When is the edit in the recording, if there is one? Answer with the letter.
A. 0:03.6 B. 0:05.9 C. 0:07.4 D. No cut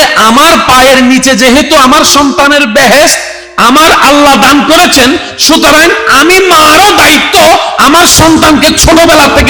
D